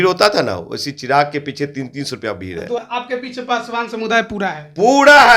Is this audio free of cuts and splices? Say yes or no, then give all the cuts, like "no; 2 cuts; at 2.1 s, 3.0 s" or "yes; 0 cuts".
no; 1 cut; at 2.8 s